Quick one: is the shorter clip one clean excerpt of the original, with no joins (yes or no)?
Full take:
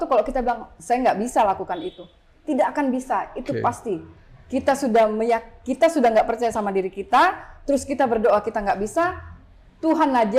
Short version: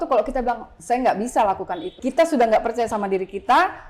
no